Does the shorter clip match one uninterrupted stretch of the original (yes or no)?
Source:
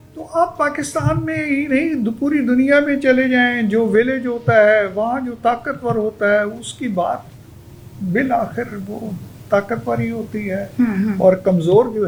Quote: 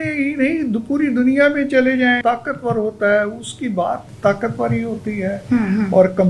no